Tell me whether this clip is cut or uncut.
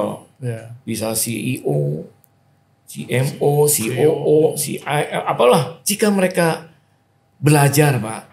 cut